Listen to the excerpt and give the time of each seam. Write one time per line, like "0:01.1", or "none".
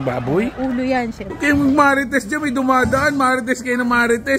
0:01.2